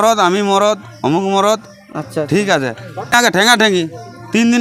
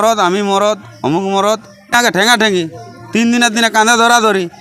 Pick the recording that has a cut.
second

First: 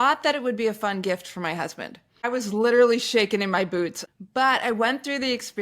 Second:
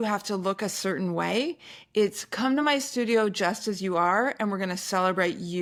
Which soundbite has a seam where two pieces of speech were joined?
first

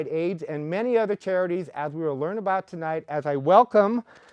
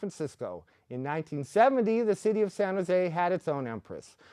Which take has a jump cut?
second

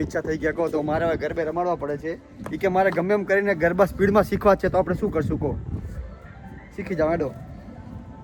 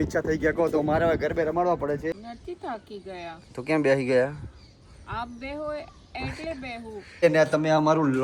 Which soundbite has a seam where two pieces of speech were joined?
second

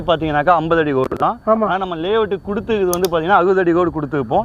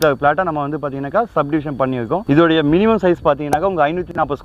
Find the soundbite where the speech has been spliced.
second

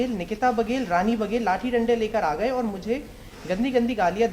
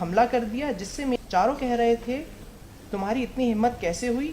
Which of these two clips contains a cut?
second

